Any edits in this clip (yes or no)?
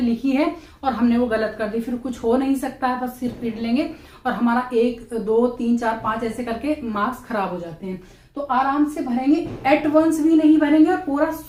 no